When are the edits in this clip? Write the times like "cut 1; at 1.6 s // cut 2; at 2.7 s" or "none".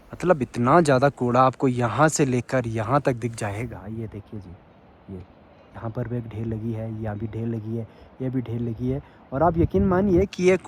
none